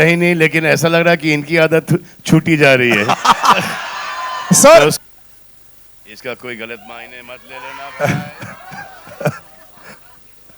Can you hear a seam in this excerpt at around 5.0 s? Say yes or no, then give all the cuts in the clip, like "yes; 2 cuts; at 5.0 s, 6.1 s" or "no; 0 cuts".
yes; 1 cut; at 5.0 s